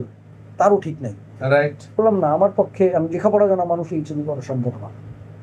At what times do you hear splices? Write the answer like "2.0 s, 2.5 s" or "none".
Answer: 2.0 s